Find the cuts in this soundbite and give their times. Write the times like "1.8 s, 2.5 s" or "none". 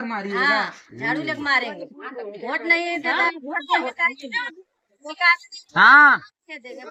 none